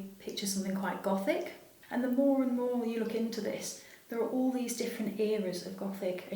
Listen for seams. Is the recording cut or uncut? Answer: cut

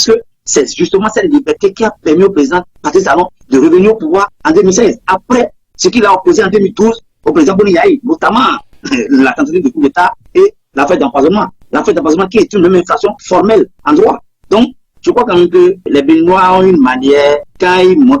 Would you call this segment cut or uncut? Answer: cut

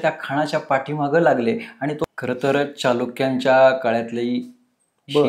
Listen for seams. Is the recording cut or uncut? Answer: cut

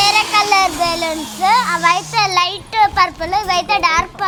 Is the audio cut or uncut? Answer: uncut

